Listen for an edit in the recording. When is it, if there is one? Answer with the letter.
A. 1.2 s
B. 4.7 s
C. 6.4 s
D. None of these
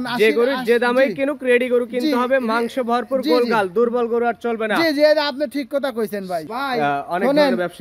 C